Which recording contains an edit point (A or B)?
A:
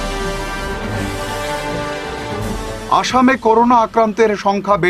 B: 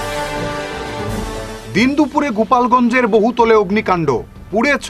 B